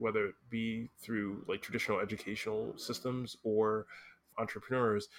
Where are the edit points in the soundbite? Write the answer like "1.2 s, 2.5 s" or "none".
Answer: none